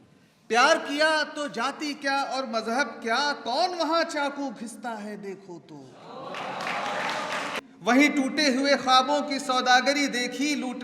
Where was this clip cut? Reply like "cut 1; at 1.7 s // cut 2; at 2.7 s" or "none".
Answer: cut 1; at 7.4 s